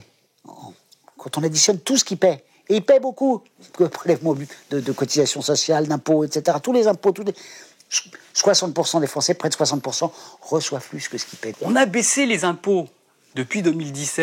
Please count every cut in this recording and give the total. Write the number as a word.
one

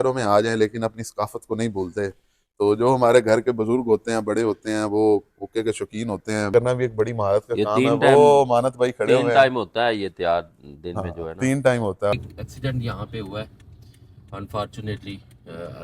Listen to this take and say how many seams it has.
two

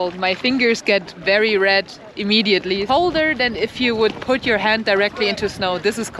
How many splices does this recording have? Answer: one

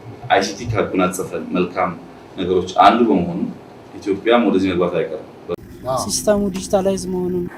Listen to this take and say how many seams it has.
one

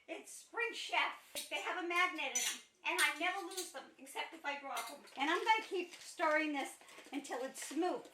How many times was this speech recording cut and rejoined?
two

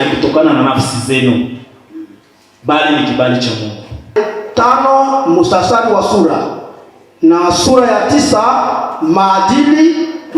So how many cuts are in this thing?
one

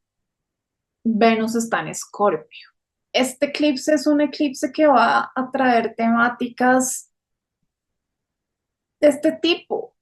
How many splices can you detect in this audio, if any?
one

